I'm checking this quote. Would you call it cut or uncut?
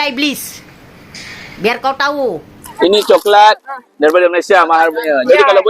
cut